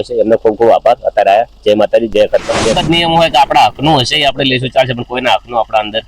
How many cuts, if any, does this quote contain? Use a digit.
1